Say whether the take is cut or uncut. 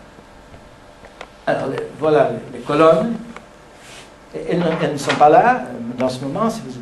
cut